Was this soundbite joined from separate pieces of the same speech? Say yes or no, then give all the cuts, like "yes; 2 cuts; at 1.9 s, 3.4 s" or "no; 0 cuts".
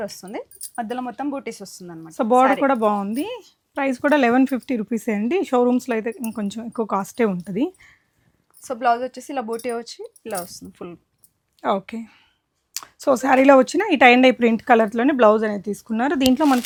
no; 0 cuts